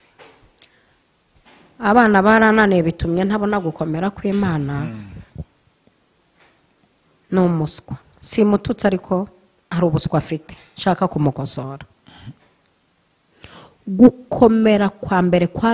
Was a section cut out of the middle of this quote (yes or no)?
no